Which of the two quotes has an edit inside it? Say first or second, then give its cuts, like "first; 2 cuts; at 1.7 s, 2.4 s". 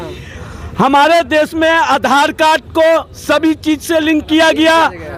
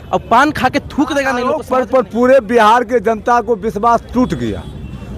second; 1 cut; at 1.5 s